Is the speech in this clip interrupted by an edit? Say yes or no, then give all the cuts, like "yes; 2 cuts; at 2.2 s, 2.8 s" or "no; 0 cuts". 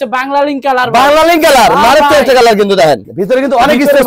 yes; 1 cut; at 3.0 s